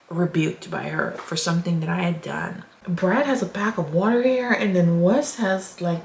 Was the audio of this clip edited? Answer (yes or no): yes